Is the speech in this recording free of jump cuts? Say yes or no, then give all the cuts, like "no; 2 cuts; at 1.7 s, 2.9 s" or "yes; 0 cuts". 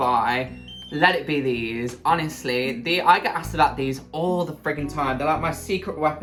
yes; 0 cuts